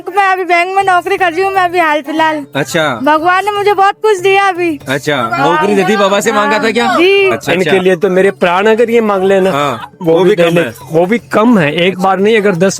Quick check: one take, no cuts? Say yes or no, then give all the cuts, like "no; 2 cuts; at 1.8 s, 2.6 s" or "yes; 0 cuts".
no; 1 cut; at 7.4 s